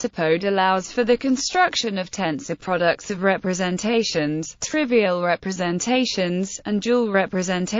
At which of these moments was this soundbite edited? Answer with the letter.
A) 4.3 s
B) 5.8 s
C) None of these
A